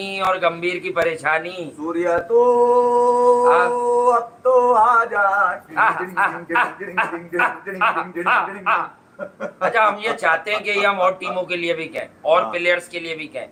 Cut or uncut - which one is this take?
uncut